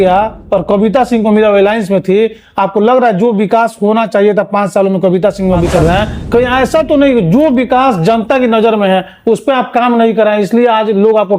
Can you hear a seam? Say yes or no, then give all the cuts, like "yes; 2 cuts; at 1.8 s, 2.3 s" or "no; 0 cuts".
yes; 1 cut; at 5.7 s